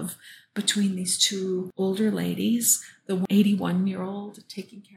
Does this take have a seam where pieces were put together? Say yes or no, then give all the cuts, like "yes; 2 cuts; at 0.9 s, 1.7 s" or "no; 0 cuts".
yes; 2 cuts; at 1.7 s, 3.2 s